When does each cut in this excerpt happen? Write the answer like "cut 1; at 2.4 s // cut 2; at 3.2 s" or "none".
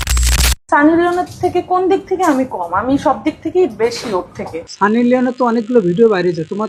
none